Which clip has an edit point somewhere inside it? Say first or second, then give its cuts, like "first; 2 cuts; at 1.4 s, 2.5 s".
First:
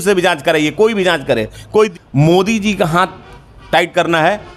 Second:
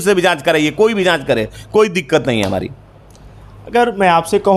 first; 1 cut; at 2.0 s